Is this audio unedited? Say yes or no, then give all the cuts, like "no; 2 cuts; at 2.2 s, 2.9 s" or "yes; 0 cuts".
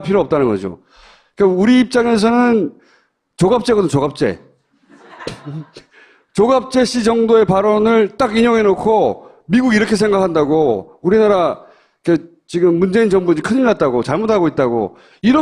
no; 1 cut; at 7.3 s